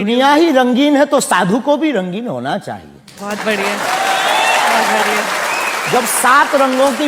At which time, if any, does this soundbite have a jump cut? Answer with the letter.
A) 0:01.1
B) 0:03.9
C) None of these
C